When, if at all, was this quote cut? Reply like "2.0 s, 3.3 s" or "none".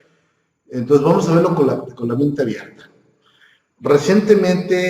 3.5 s